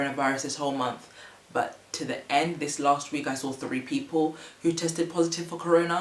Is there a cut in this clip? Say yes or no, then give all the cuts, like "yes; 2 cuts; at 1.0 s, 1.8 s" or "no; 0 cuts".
no; 0 cuts